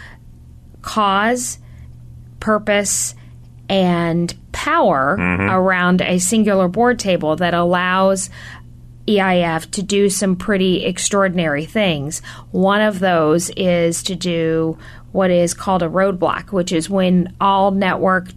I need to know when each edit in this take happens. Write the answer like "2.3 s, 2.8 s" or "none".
none